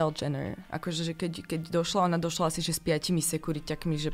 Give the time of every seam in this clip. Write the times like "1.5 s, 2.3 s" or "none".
none

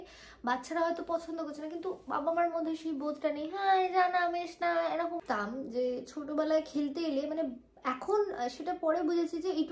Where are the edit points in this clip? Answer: 5.2 s

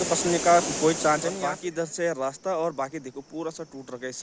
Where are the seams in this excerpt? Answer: 1.3 s

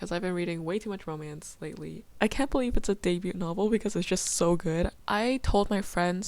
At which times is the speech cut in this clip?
2.0 s, 5.0 s

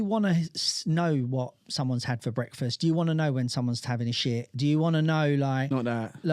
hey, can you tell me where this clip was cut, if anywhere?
none

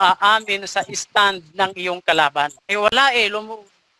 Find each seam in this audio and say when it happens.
2.6 s

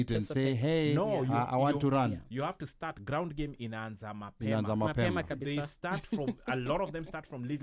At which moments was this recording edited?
none

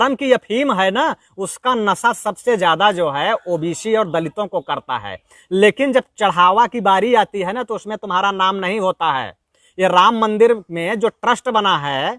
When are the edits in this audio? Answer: none

